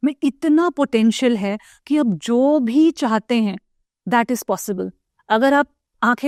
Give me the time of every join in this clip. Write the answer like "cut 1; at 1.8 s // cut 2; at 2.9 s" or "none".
none